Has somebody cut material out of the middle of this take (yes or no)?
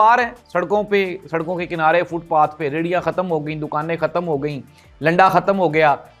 no